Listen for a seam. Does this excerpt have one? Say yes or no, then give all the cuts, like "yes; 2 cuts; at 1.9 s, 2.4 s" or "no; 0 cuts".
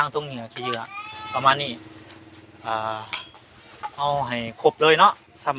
no; 0 cuts